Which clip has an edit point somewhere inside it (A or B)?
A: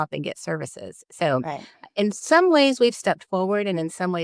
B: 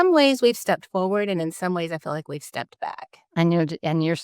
B